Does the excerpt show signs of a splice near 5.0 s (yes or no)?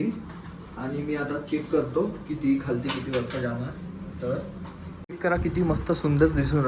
yes